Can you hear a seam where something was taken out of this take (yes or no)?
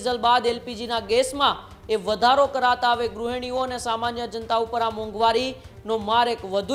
no